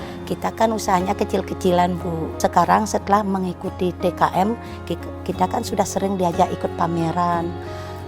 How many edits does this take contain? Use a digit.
1